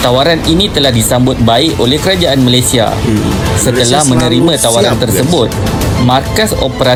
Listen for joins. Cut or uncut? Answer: uncut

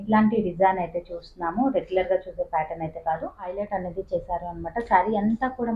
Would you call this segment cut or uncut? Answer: cut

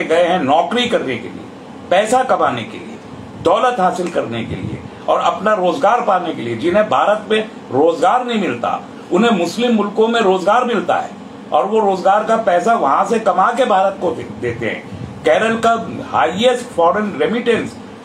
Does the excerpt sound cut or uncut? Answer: uncut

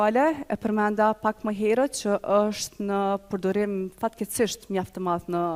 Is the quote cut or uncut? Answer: uncut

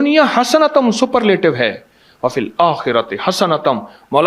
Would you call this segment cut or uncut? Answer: uncut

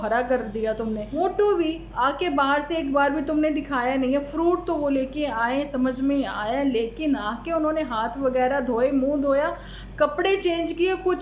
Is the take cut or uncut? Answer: cut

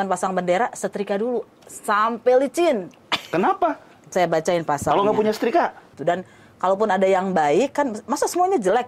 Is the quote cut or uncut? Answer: cut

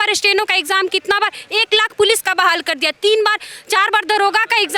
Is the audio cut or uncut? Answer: uncut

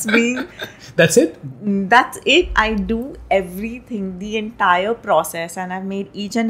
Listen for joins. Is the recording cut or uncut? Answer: uncut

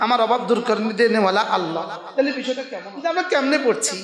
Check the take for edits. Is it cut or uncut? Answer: cut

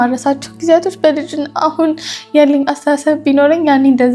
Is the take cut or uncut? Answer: uncut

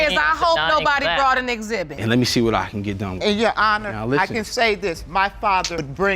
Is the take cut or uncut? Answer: cut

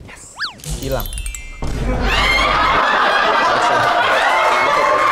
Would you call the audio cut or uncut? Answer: uncut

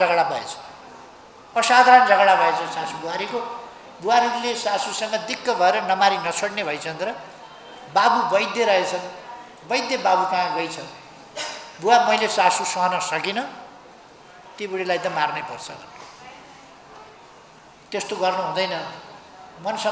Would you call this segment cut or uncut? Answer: uncut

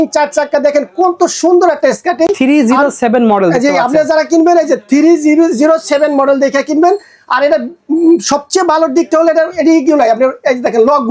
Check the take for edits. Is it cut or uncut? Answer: uncut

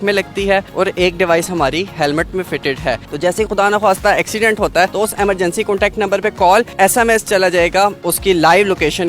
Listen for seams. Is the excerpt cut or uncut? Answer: cut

